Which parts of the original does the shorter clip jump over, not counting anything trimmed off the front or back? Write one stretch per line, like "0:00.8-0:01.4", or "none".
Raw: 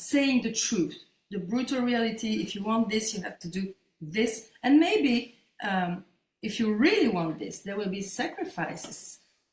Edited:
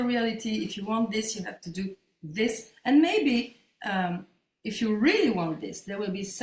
none

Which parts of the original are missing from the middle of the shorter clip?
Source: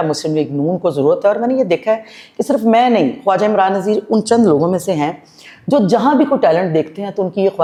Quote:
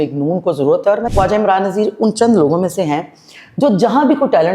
0:01.4-0:03.2

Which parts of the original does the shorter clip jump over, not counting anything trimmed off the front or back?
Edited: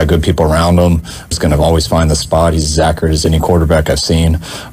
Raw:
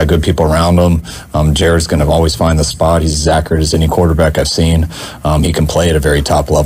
0:01.3-0:01.8

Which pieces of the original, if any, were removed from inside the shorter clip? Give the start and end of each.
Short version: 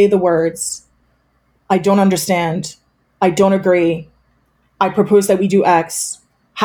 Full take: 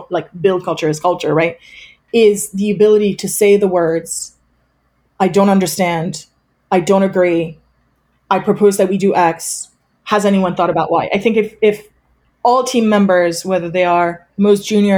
none

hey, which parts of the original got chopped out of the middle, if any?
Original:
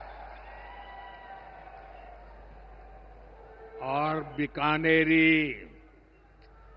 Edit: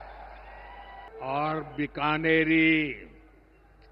0:01.1-0:03.7

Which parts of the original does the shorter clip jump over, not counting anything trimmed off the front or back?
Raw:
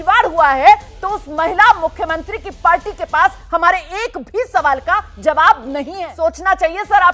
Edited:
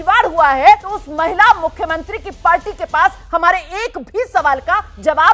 0:00.9-0:01.1

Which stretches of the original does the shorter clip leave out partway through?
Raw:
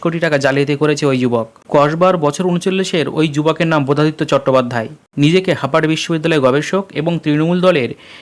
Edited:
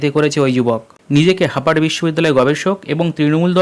0:01.6-0:05.0

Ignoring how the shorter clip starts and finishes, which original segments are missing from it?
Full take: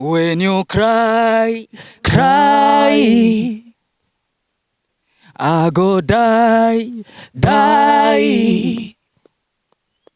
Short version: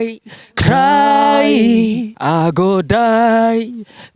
0:03.6-0:05.3

